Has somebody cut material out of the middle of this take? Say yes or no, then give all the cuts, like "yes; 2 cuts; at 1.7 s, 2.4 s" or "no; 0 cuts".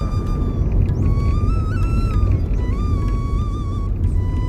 no; 0 cuts